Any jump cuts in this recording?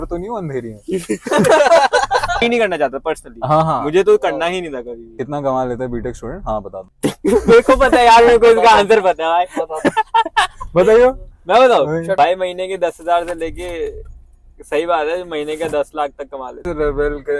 yes; 4 cuts; at 2.4 s, 5.2 s, 12.2 s, 16.6 s

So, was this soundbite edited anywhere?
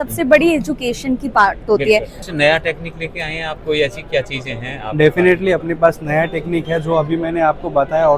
yes; 1 cut; at 2.2 s

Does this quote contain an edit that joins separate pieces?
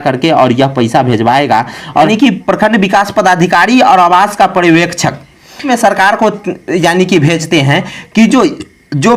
yes; 2 cuts; at 2.1 s, 5.7 s

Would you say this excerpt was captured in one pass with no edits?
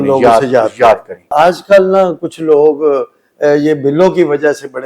no; 1 cut; at 1.2 s

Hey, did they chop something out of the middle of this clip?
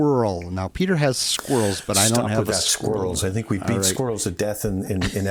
no; 0 cuts

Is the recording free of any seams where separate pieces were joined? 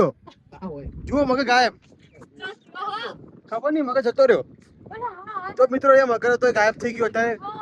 yes; 0 cuts

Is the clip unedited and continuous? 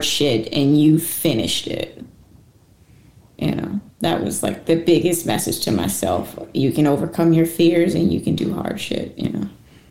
yes; 0 cuts

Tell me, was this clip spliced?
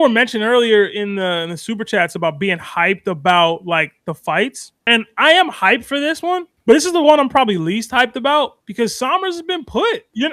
no; 0 cuts

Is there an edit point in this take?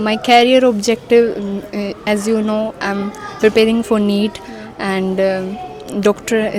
no; 0 cuts

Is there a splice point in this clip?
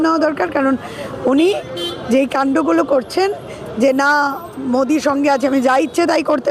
no; 0 cuts

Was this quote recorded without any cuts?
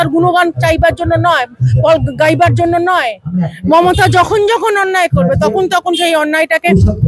yes; 0 cuts

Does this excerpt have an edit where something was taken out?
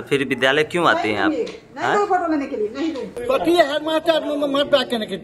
yes; 1 cut; at 3.2 s

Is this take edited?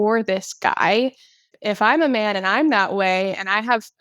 yes; 1 cut; at 1.5 s

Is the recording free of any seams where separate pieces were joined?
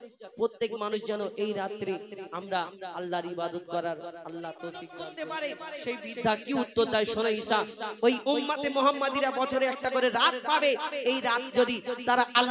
no; 1 cut; at 4.9 s

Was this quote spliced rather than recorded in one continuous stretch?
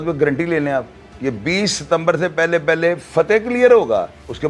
no; 0 cuts

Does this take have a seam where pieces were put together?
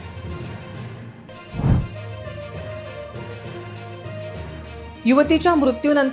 yes; 1 cut; at 1.2 s

